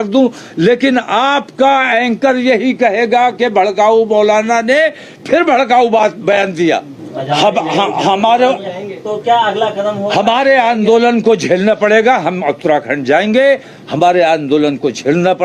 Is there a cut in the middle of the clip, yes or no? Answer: no